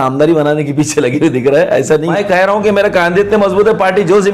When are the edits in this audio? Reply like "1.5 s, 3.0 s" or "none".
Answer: 2.1 s